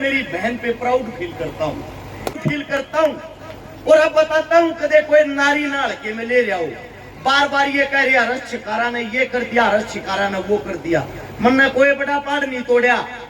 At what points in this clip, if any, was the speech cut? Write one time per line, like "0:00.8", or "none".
0:02.3